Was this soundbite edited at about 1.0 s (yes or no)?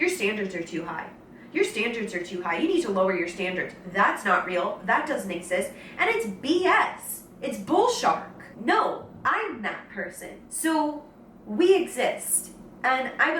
no